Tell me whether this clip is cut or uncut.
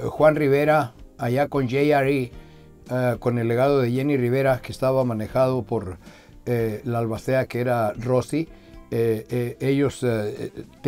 uncut